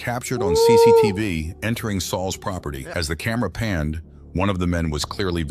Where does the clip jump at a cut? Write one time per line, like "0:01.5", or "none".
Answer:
0:02.8